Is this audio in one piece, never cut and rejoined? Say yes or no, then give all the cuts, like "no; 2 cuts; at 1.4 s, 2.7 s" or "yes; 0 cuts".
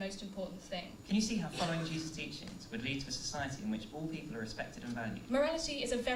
no; 2 cuts; at 0.9 s, 5.2 s